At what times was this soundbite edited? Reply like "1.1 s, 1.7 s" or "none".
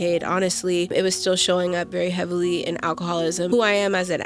0.9 s, 3.5 s